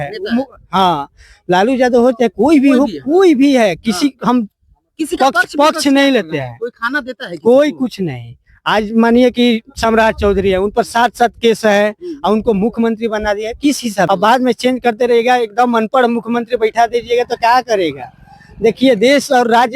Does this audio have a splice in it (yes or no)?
yes